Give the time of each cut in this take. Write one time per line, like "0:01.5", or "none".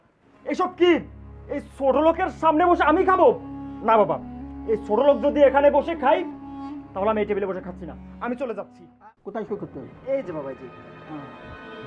0:08.8